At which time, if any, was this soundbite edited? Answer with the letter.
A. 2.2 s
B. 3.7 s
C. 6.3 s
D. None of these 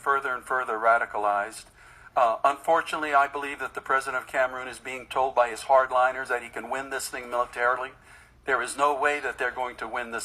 D